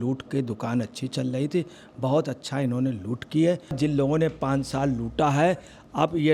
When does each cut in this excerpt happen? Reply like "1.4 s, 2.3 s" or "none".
3.8 s